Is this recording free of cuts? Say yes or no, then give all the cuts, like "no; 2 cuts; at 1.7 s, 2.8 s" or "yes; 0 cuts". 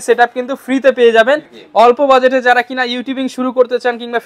no; 1 cut; at 1.6 s